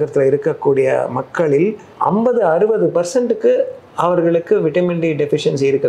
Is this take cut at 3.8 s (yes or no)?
no